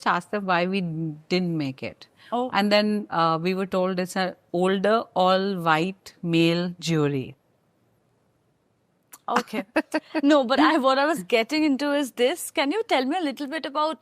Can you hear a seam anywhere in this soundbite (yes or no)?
no